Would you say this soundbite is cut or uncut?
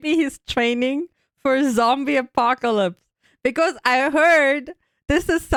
uncut